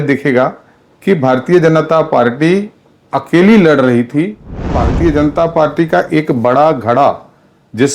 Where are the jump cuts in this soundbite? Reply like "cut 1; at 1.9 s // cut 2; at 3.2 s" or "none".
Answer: cut 1; at 4.8 s